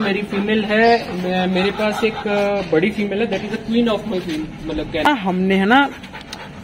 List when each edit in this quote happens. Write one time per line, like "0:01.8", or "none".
0:05.1